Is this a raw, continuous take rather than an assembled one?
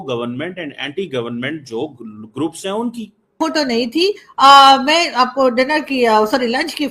no; 1 cut; at 3.4 s

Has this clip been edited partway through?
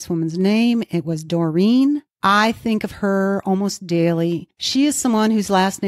yes; 2 cuts; at 2.1 s, 4.5 s

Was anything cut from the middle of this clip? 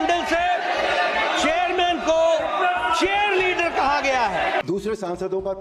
yes; 1 cut; at 4.6 s

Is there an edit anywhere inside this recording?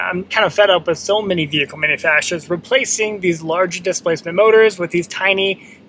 no; 0 cuts

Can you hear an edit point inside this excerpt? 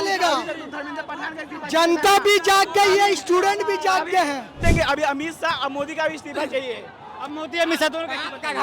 yes; 1 cut; at 4.6 s

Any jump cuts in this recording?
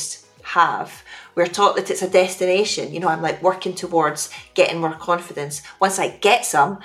no; 0 cuts

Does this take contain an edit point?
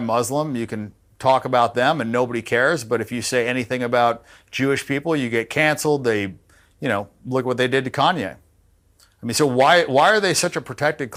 no; 0 cuts

